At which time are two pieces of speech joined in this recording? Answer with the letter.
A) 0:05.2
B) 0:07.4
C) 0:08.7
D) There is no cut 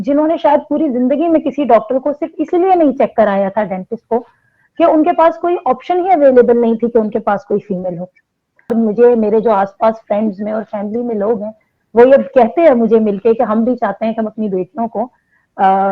C